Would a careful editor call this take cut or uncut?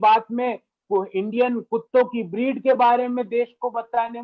uncut